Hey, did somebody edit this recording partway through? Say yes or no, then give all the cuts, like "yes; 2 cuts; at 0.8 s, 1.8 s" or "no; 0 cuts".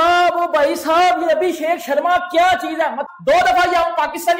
yes; 1 cut; at 3.1 s